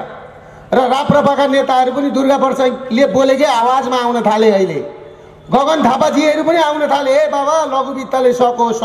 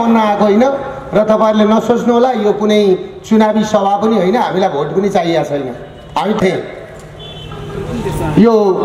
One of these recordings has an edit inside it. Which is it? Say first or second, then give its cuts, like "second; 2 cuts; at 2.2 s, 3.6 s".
second; 1 cut; at 6.4 s